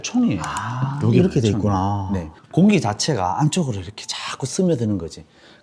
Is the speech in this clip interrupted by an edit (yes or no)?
yes